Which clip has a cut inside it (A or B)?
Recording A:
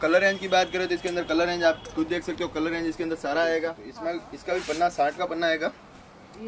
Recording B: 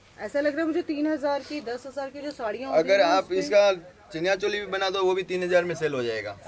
A